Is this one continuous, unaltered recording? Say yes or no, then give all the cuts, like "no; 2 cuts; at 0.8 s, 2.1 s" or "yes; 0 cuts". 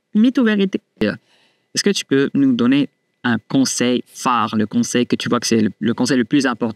no; 1 cut; at 1.0 s